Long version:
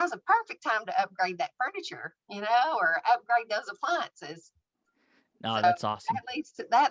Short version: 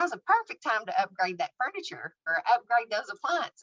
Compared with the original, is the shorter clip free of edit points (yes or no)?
no